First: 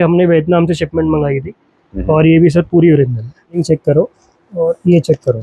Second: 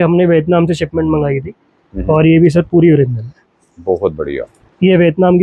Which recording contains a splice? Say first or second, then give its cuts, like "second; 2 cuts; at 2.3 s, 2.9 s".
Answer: first; 1 cut; at 3.6 s